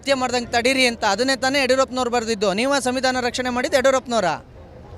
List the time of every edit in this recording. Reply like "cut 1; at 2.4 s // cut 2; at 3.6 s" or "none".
none